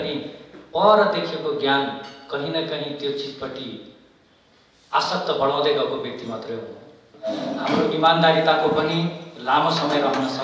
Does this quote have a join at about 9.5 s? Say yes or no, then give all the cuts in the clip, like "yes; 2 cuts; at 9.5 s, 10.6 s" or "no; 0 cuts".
no; 1 cut; at 7.1 s